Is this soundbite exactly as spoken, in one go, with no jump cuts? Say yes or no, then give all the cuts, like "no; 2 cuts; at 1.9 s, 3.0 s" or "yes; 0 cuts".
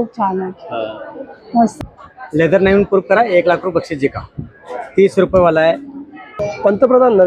no; 2 cuts; at 1.7 s, 6.3 s